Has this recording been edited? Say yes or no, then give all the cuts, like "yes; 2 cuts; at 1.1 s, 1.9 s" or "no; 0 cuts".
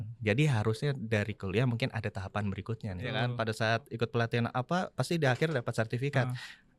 yes; 1 cut; at 3.1 s